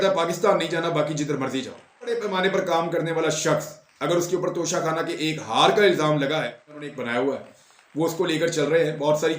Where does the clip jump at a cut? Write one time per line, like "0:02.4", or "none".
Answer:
0:02.1
0:06.9